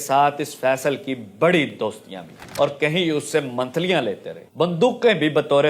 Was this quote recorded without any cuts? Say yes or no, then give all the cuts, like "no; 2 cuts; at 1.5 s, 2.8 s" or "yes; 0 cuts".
no; 2 cuts; at 2.5 s, 4.5 s